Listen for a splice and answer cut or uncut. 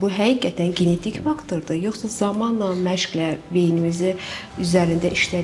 uncut